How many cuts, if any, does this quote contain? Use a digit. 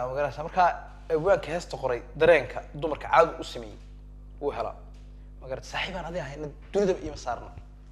0